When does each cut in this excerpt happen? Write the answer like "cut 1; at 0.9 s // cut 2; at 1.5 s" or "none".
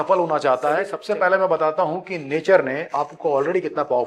cut 1; at 0.9 s